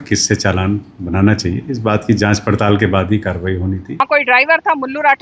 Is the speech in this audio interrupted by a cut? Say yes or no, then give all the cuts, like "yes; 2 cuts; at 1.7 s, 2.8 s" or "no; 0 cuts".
yes; 1 cut; at 4.0 s